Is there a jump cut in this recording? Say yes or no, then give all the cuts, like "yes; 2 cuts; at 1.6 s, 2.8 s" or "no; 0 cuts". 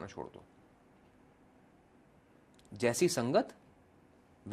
no; 0 cuts